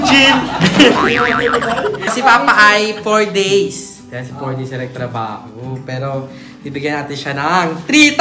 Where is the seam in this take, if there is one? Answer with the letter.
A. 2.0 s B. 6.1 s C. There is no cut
A